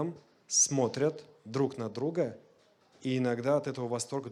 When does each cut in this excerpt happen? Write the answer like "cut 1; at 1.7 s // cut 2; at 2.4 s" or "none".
none